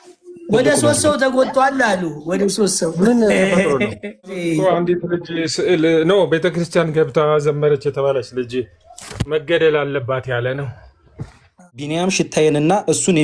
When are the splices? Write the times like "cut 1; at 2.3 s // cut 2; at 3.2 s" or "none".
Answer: cut 1; at 4.4 s // cut 2; at 11.9 s